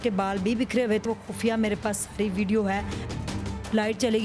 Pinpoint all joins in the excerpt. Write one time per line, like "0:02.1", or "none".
0:01.0
0:03.2

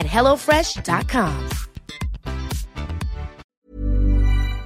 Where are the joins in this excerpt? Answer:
0:03.5

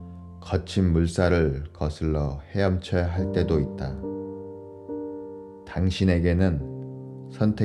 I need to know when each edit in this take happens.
none

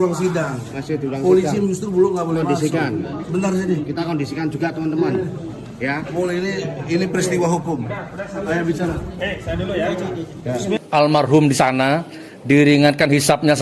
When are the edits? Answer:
0:10.8

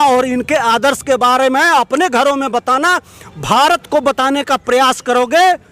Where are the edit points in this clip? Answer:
none

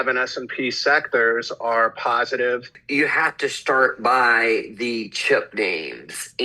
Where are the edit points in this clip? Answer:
0:02.8

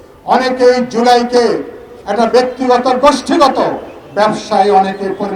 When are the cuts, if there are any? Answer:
none

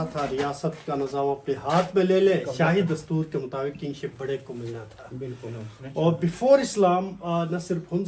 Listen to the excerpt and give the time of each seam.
none

